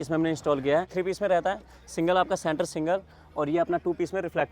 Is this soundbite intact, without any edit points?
no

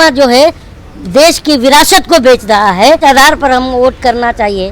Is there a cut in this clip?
yes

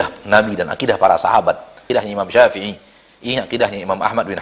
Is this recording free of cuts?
no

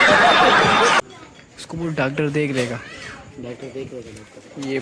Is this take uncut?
yes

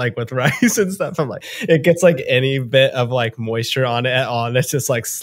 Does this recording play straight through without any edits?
no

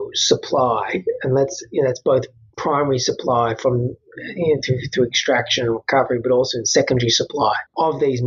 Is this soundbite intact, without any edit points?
yes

